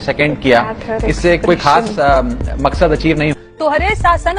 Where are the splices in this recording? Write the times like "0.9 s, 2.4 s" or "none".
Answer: 3.3 s